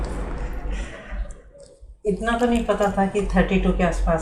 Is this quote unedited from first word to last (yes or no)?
yes